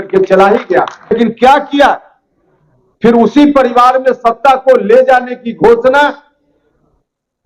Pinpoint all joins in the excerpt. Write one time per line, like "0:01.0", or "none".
0:01.1